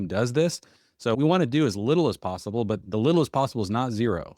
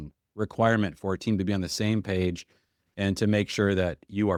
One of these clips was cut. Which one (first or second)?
first